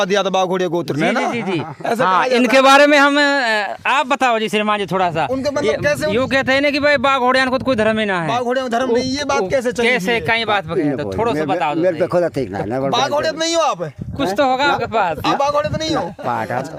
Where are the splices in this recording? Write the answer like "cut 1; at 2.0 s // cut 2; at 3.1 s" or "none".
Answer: none